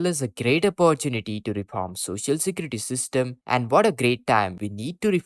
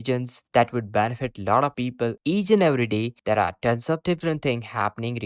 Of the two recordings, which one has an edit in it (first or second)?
second